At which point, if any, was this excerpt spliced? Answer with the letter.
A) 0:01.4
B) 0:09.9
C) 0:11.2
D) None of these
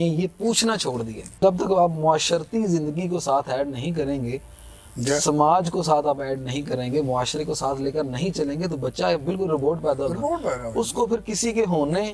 A